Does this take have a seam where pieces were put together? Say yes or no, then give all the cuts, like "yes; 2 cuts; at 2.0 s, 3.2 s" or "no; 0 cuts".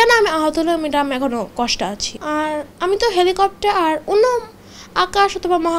yes; 1 cut; at 2.1 s